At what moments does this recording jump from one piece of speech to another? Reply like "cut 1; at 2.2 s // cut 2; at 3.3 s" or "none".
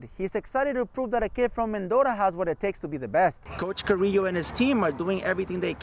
cut 1; at 3.5 s